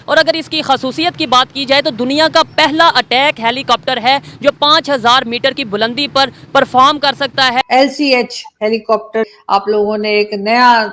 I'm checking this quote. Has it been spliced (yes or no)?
yes